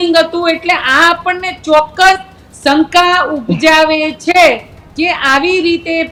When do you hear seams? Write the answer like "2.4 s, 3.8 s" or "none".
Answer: none